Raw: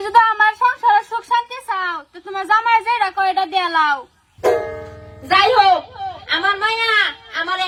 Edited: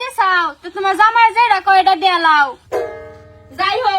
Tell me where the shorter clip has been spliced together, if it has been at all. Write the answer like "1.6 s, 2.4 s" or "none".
2.6 s